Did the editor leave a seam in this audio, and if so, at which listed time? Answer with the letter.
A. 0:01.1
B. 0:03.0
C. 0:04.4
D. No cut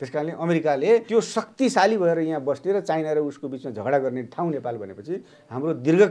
A